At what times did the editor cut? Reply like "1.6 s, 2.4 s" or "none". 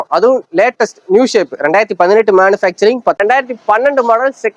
3.2 s